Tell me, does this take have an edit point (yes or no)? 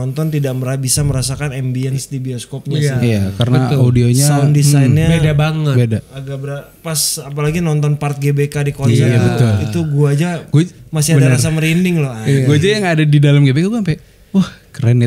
no